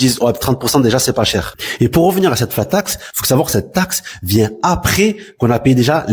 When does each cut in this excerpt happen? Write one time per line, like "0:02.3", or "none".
none